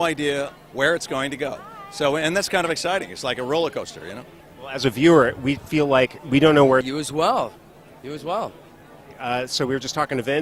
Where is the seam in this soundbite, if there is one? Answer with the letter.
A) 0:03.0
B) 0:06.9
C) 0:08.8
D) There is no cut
D